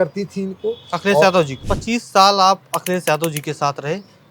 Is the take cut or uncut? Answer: cut